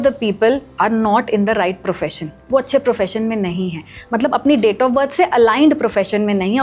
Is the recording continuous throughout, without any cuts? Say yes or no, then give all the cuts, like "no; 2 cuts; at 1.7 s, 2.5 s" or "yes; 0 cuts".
yes; 0 cuts